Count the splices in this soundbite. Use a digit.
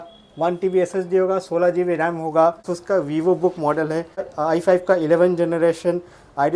2